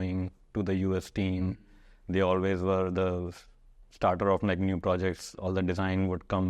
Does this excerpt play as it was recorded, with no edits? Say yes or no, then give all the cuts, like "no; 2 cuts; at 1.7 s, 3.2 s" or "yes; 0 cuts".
yes; 0 cuts